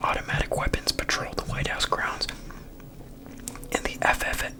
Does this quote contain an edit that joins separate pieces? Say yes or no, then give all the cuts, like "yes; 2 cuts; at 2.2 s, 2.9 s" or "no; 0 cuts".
no; 0 cuts